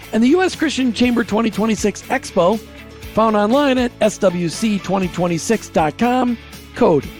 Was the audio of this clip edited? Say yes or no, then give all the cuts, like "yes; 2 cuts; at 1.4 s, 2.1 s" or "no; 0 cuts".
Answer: no; 0 cuts